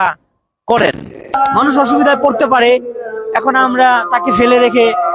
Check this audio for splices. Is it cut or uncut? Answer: cut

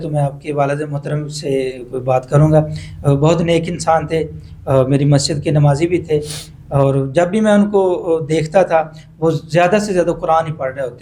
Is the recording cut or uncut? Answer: uncut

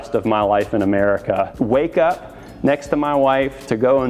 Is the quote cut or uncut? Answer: cut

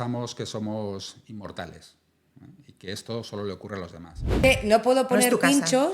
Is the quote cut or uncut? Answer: cut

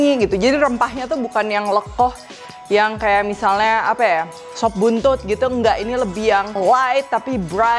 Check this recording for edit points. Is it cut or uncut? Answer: cut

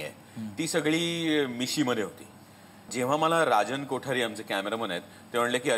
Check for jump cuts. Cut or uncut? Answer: cut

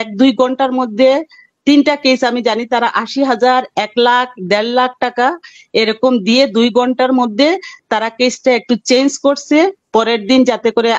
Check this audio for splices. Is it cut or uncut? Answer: uncut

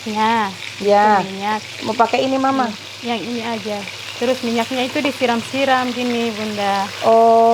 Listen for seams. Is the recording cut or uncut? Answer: uncut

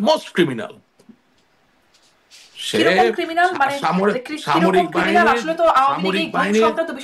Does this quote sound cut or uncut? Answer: uncut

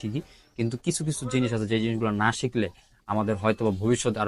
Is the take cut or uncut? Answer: uncut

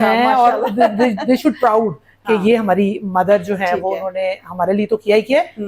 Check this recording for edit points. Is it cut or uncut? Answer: uncut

